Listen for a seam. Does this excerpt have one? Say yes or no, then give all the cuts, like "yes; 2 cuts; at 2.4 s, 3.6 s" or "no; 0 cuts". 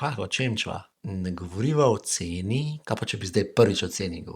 yes; 1 cut; at 0.9 s